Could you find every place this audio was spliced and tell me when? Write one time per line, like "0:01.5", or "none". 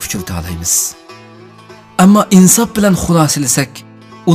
none